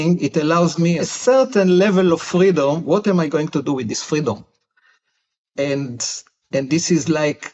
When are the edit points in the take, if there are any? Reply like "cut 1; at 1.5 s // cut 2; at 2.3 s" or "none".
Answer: cut 1; at 1.0 s

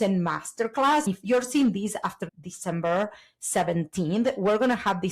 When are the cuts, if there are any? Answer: cut 1; at 1.1 s

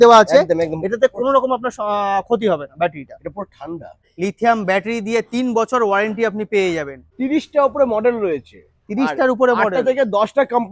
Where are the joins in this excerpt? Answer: cut 1; at 4.0 s // cut 2; at 7.0 s

